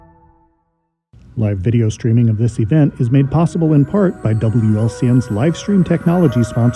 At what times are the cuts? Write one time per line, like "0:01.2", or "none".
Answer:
0:01.4